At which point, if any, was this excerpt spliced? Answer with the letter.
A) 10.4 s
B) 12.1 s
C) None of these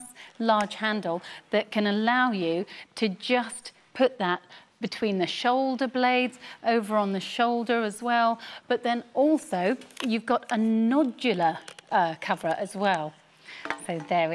B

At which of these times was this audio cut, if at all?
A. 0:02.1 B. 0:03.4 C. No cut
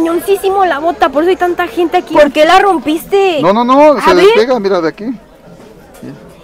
A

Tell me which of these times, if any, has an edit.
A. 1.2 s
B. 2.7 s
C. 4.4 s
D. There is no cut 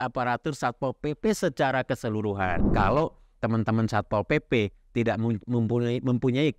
B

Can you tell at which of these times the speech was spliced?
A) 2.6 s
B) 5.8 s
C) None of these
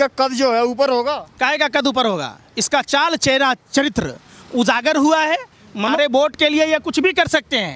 B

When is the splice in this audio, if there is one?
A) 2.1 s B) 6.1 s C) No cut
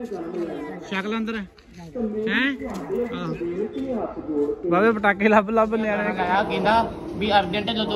B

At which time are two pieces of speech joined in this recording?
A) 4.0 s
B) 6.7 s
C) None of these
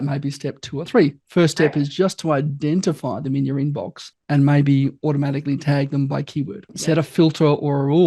B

